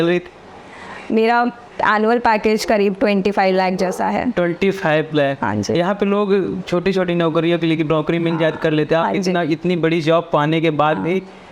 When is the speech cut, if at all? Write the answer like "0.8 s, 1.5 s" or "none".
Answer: none